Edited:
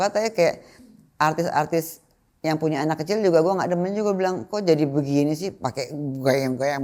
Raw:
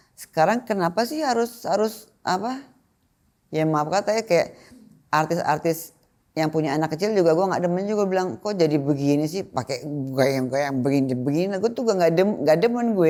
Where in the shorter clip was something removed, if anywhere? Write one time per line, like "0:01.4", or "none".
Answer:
none